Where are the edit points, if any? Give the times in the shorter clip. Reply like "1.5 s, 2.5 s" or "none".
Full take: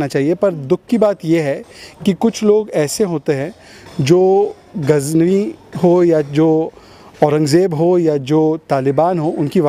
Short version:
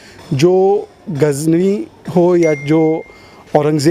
none